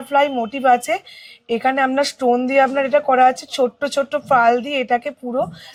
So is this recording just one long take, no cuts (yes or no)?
yes